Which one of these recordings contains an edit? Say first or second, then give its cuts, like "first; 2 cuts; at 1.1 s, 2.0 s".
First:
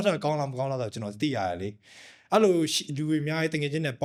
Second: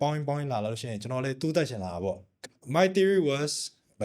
second; 1 cut; at 2.3 s